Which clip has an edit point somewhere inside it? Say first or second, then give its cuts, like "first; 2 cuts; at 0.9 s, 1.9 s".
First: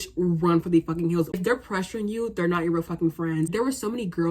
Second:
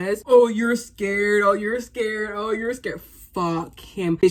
first; 2 cuts; at 1.4 s, 3.5 s